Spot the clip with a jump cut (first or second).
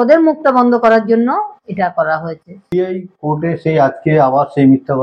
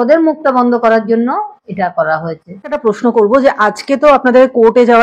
first